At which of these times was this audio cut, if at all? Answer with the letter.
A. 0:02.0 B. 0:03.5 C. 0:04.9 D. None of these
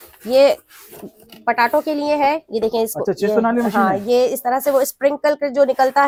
D